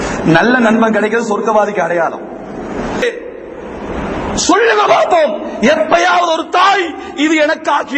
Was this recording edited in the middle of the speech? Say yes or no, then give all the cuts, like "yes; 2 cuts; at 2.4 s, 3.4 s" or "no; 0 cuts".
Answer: yes; 1 cut; at 3.0 s